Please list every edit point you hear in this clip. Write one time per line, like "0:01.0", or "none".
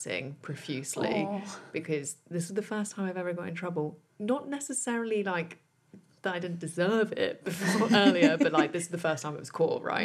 none